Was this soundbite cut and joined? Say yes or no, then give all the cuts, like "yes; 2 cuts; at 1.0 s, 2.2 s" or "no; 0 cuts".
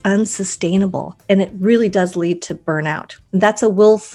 yes; 2 cuts; at 1.1 s, 3.1 s